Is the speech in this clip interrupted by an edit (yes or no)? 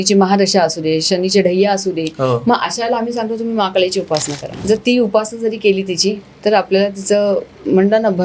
yes